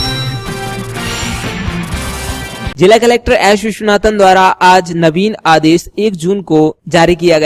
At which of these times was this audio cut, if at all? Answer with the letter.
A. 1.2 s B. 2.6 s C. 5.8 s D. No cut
B